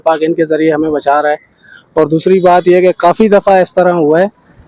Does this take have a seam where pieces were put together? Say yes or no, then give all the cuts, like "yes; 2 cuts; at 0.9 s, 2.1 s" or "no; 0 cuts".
no; 0 cuts